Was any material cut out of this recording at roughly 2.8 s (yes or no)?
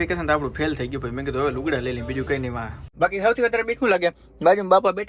yes